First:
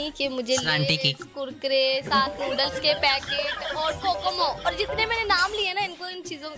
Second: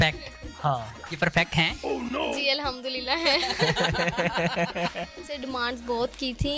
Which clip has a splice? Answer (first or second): second